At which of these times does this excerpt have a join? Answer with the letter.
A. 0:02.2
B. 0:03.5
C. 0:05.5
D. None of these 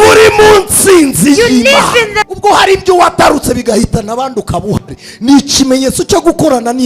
A